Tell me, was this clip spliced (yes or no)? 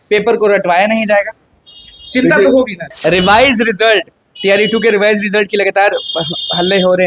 yes